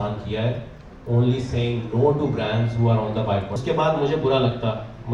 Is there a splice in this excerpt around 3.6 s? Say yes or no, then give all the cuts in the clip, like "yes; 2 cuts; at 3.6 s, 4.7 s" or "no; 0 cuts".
yes; 1 cut; at 3.6 s